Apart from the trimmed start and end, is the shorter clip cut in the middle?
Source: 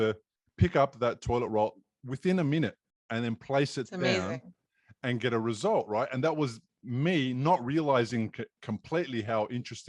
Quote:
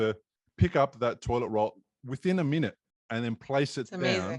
no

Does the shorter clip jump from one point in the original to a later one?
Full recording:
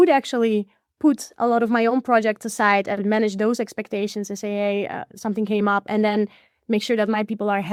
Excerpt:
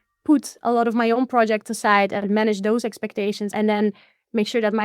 yes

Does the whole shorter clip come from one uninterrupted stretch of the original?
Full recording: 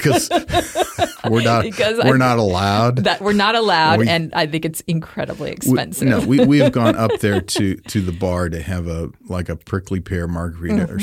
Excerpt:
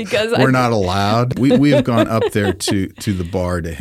no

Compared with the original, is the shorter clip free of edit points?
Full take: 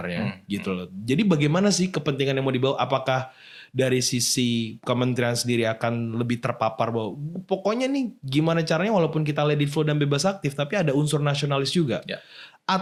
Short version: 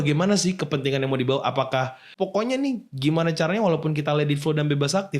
no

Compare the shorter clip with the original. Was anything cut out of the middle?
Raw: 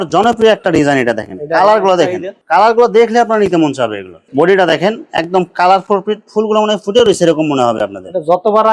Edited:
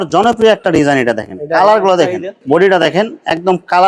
yes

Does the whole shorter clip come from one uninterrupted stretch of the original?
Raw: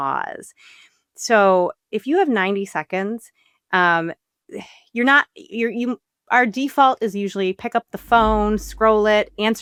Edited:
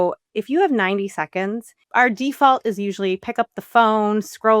no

